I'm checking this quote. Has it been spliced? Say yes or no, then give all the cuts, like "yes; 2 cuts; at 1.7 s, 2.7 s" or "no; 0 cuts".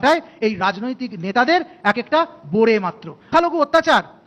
yes; 1 cut; at 3.3 s